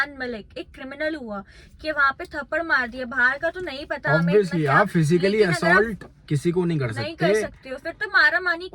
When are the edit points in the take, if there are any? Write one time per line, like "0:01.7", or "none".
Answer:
none